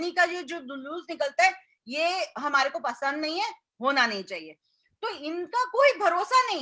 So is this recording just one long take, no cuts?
yes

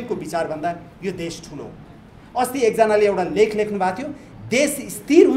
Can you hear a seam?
no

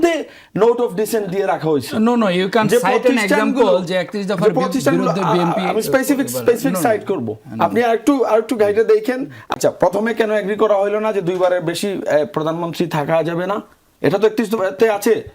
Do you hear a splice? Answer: yes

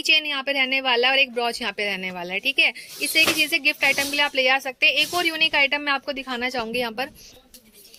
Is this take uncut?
yes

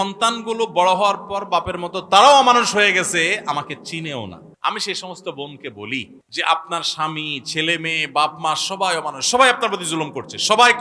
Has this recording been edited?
yes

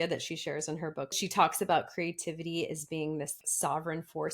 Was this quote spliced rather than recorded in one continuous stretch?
yes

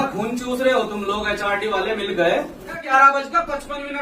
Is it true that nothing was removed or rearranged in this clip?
no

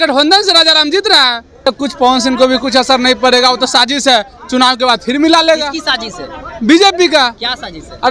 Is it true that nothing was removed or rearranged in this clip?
no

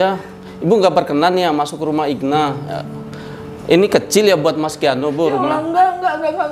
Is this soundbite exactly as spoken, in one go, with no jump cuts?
yes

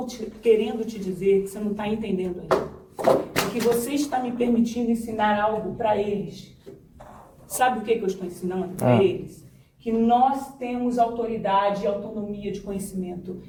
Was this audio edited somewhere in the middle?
no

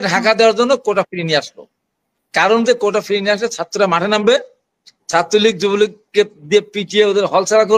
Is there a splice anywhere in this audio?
no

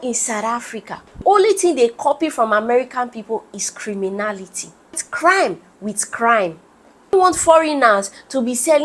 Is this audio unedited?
no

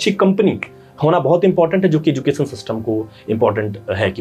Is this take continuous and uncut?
yes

